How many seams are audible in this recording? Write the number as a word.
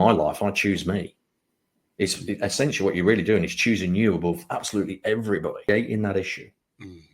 one